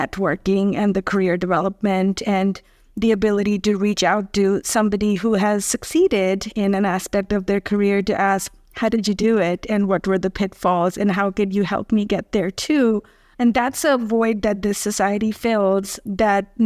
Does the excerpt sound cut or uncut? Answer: uncut